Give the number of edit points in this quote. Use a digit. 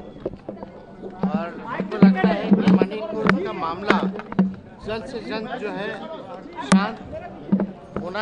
0